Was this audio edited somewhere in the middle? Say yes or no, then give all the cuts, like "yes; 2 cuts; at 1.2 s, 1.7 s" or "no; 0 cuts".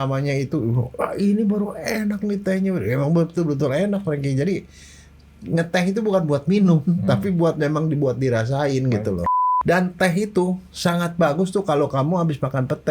yes; 1 cut; at 9.3 s